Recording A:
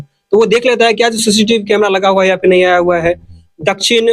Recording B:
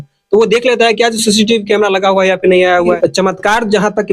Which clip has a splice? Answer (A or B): B